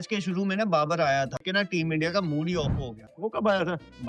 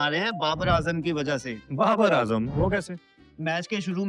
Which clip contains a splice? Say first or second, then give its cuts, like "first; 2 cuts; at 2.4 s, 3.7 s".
first; 2 cuts; at 1.4 s, 3.1 s